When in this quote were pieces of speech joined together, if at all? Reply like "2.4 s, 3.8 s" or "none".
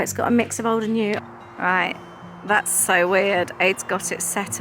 1.2 s